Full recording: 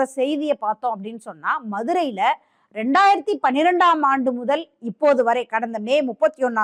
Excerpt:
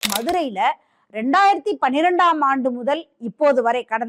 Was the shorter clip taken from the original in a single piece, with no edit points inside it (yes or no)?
yes